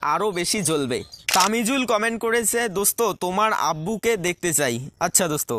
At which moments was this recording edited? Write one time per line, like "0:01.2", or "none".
0:01.1